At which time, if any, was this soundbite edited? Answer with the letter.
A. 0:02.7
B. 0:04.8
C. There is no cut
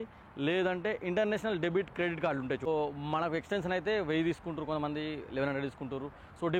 A